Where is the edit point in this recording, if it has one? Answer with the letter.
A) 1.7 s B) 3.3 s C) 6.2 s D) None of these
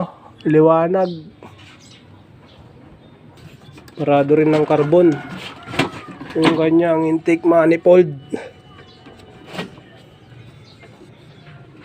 B